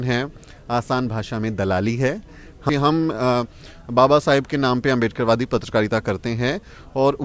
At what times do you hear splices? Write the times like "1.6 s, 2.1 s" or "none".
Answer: 2.6 s

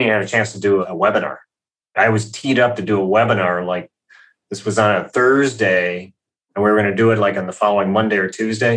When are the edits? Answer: none

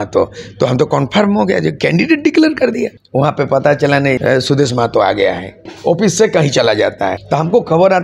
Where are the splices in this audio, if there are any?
3.0 s, 4.2 s, 5.7 s, 7.2 s

